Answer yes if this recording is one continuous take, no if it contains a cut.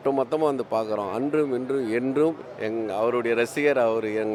yes